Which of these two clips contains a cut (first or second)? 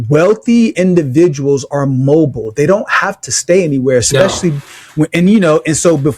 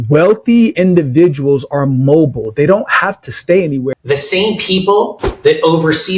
second